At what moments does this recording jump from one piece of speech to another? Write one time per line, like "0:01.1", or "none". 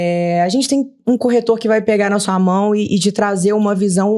none